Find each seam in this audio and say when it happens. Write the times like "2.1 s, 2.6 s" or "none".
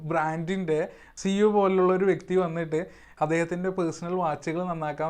1.0 s, 3.1 s